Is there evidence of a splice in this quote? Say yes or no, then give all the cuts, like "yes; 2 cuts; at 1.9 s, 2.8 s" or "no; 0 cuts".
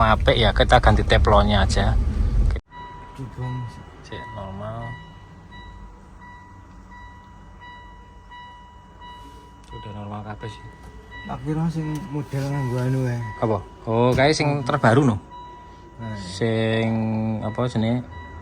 yes; 1 cut; at 2.5 s